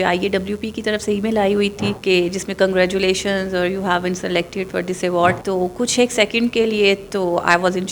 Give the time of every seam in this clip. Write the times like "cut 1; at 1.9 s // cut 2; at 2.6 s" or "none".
cut 1; at 2.0 s // cut 2; at 5.4 s